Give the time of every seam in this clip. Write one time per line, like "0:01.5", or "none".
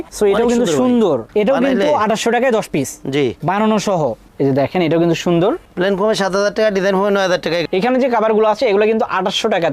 0:04.2
0:07.7